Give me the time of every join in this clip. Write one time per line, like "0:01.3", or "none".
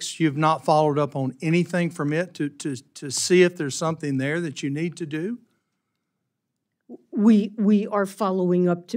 none